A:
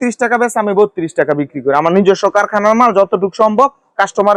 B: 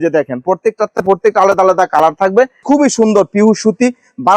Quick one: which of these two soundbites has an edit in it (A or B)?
B